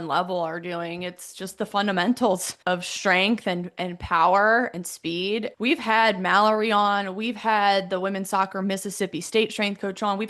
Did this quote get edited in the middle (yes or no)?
yes